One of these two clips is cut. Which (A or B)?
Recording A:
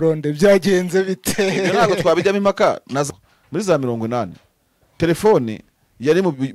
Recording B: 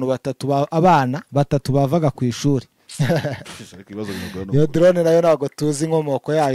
A